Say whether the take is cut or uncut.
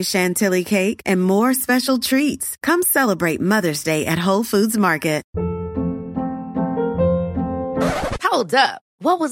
cut